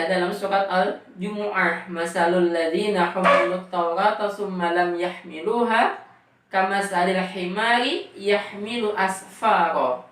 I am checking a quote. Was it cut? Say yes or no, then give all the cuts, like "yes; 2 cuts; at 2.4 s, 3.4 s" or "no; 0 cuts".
no; 0 cuts